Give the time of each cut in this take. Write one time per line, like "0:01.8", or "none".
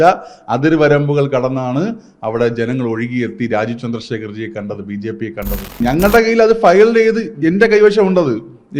0:05.8